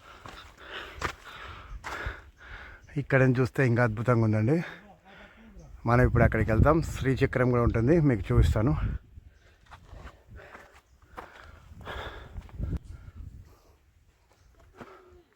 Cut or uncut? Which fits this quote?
cut